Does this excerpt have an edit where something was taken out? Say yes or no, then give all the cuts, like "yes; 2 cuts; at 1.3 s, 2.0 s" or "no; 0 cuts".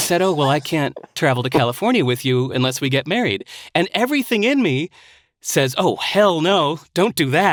no; 0 cuts